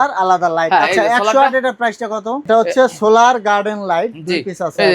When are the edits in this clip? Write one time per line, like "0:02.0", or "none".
0:02.4